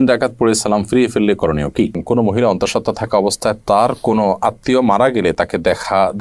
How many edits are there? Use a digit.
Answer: 1